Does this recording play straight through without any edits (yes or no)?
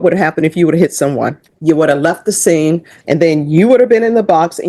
no